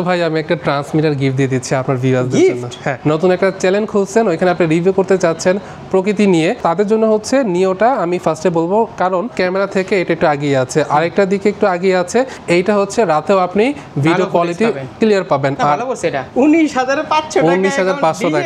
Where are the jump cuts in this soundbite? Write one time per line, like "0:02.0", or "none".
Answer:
0:02.9
0:06.6
0:09.3
0:12.4
0:16.2

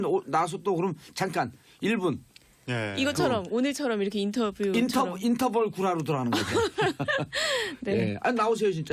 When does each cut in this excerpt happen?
0:00.9

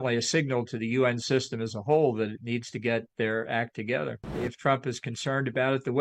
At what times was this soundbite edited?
0:04.4

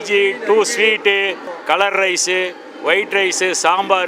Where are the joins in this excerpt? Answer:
0:01.5

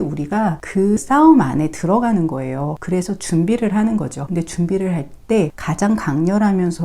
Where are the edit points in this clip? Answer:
0:01.0
0:02.8
0:04.2
0:05.6

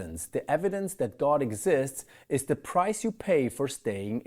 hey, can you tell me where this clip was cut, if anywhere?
none

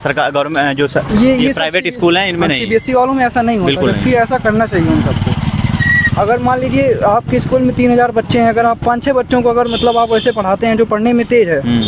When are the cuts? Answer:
none

